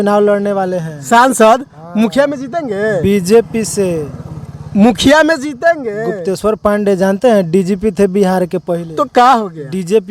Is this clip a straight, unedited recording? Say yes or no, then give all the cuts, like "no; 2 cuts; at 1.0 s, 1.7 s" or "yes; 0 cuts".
yes; 0 cuts